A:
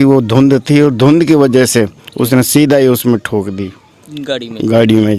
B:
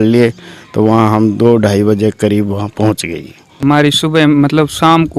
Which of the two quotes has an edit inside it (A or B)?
B